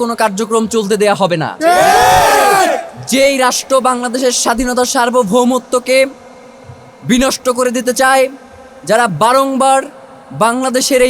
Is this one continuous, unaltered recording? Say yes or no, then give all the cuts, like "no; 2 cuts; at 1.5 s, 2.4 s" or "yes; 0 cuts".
yes; 0 cuts